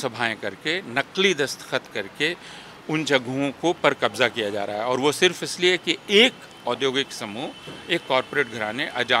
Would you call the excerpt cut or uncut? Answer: uncut